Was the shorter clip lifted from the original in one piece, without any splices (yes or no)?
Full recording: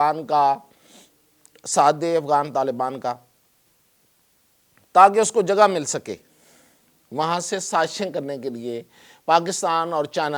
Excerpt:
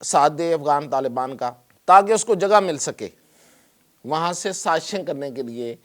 no